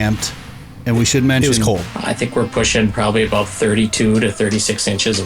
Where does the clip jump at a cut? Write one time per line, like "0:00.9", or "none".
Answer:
0:01.9